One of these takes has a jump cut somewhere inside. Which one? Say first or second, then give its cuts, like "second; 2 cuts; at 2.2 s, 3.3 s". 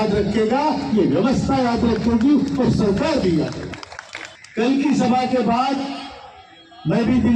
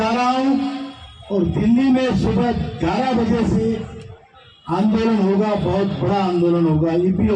first; 1 cut; at 4.4 s